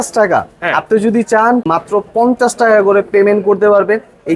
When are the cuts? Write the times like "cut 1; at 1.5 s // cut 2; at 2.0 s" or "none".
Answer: cut 1; at 1.7 s